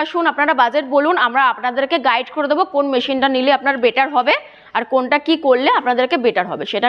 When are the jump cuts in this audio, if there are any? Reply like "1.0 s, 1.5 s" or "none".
none